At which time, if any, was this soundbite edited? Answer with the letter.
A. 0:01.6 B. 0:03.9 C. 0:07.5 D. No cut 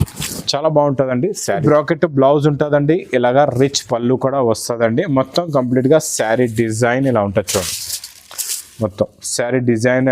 A